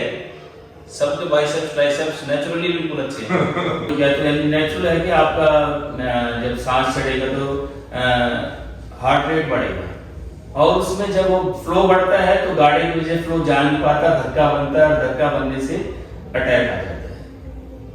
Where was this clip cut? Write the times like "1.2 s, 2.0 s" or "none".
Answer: 3.9 s